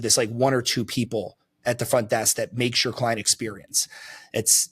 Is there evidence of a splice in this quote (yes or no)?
no